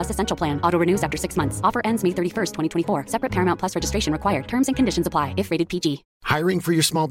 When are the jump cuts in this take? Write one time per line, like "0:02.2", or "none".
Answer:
none